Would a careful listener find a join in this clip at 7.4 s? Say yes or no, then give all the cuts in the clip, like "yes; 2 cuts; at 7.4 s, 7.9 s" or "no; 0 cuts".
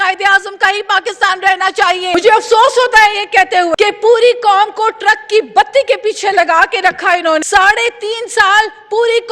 yes; 3 cuts; at 2.1 s, 3.7 s, 7.4 s